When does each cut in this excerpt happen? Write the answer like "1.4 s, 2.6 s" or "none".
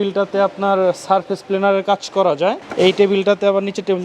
2.6 s